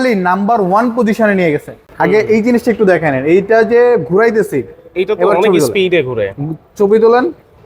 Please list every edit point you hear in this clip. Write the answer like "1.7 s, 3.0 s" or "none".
1.8 s